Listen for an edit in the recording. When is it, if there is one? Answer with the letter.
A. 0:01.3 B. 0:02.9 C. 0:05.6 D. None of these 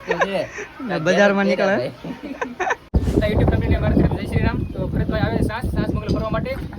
B